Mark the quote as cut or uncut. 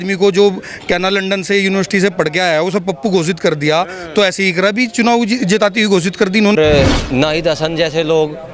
cut